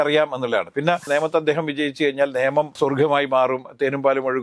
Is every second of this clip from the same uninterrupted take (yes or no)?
no